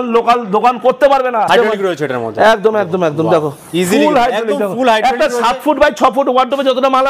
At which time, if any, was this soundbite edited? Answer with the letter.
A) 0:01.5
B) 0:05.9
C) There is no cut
A